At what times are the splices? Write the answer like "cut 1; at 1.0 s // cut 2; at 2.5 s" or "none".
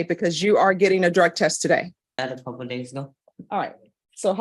cut 1; at 2.2 s